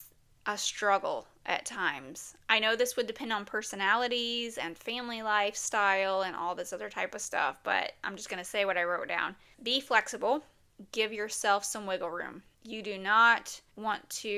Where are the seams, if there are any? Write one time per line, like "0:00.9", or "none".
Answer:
none